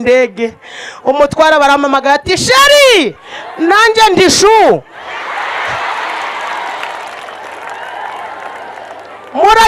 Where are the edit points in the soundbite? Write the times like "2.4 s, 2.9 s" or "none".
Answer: none